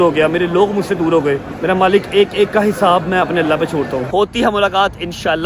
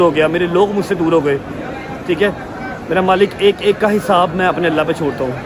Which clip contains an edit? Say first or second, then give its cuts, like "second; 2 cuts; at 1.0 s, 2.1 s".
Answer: first; 2 cuts; at 1.5 s, 4.1 s